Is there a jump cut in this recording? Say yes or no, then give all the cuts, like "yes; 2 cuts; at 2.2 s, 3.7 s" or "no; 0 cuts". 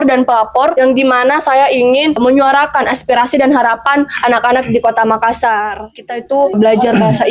yes; 3 cuts; at 0.7 s, 2.2 s, 6.0 s